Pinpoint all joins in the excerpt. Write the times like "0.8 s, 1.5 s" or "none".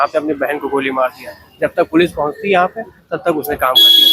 none